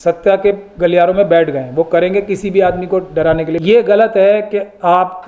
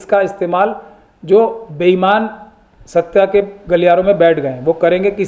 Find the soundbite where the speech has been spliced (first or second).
first